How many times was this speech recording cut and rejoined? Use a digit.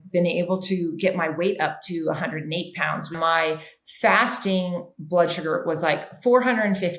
1